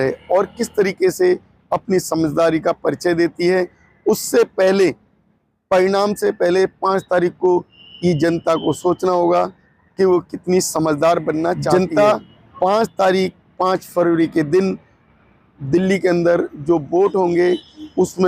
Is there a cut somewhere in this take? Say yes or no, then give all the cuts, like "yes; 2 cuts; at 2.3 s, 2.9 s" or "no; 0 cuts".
yes; 1 cut; at 11.7 s